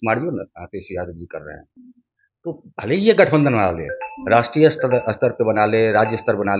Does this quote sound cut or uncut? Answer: uncut